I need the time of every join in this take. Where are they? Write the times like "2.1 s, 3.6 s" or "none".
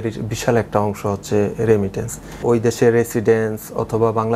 2.4 s